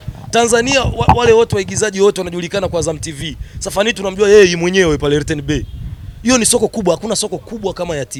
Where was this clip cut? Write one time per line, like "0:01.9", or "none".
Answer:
none